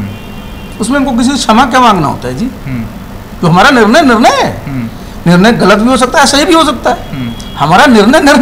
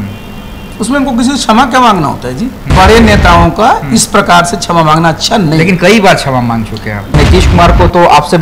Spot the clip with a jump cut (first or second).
second